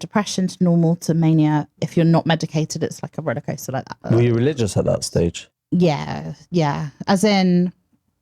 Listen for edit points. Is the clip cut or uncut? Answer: cut